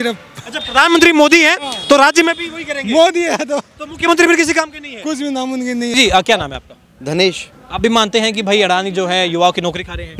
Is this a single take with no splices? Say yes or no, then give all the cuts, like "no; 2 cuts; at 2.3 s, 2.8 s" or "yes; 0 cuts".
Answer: no; 1 cut; at 5.9 s